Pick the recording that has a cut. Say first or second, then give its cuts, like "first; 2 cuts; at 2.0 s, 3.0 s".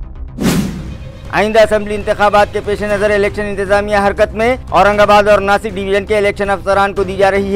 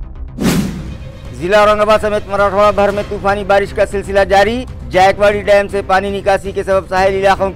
second; 1 cut; at 1.0 s